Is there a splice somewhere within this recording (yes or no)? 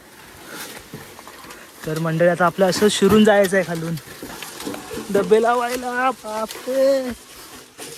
no